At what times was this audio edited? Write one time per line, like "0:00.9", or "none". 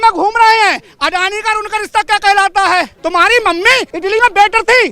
0:02.9
0:03.9